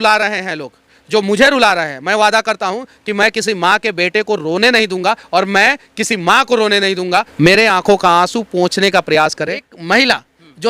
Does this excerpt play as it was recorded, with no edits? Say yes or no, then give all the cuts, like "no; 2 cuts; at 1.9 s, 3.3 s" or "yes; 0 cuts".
no; 2 cuts; at 7.3 s, 9.7 s